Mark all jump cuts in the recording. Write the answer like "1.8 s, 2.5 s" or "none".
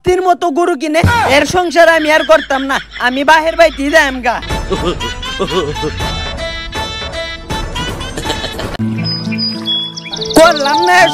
none